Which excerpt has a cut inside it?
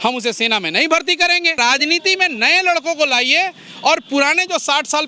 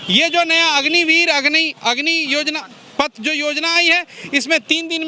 first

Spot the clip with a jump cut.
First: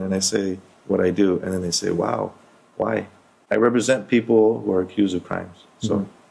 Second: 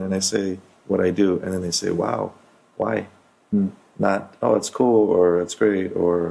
first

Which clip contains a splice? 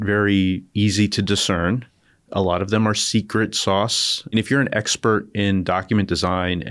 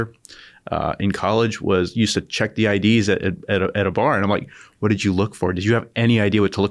first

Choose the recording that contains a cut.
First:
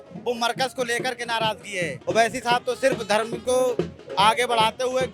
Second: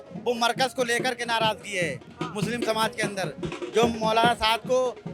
first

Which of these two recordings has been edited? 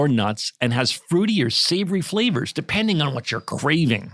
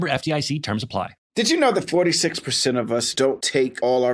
second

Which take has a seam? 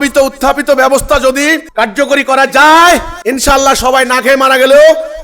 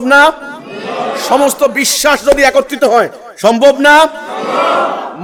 first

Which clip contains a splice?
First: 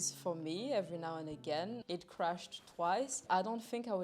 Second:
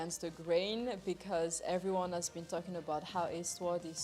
first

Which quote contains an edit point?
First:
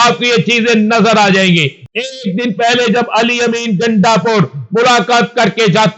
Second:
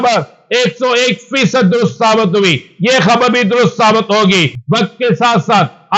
first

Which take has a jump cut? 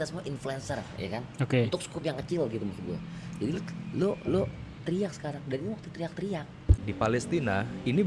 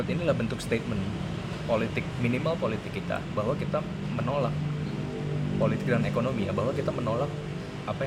first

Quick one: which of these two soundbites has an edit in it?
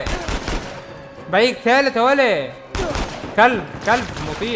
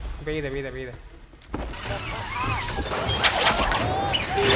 second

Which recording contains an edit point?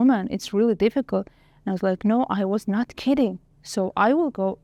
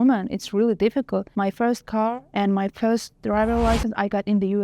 second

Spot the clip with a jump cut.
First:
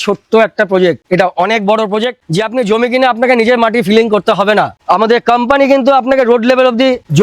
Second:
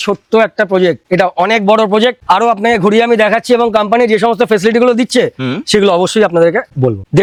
first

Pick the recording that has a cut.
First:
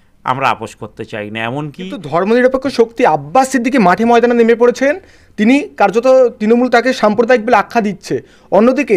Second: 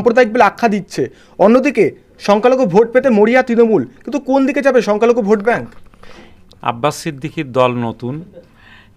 first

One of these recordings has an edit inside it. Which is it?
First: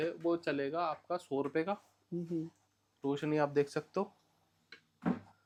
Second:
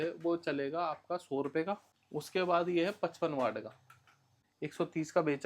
second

